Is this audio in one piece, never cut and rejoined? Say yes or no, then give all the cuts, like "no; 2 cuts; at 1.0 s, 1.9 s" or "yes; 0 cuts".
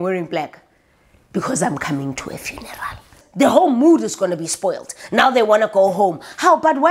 no; 1 cut; at 3.2 s